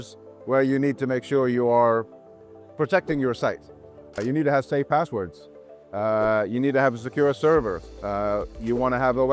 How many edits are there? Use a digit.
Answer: 1